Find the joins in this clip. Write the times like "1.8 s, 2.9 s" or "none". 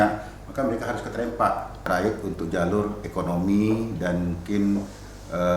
1.8 s